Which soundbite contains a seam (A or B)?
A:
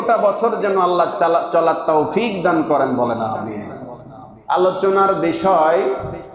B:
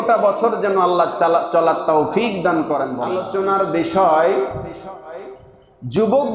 B